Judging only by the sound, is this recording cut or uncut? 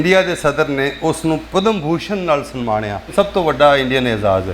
cut